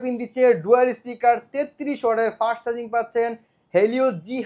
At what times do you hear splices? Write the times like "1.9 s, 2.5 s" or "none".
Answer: none